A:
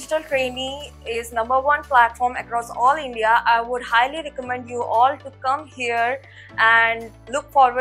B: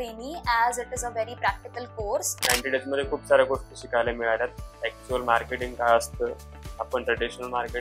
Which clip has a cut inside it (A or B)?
B